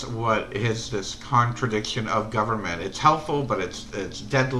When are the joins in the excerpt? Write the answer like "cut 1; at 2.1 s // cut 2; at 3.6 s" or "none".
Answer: cut 1; at 2.0 s